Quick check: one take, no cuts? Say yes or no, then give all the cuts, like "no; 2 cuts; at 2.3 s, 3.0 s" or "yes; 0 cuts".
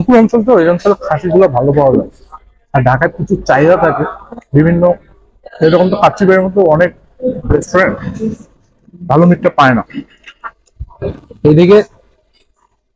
yes; 0 cuts